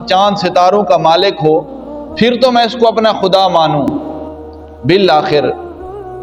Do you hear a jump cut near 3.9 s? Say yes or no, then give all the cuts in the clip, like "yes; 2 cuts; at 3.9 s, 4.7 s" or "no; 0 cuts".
no; 0 cuts